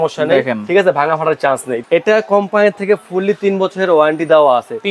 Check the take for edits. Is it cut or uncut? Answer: cut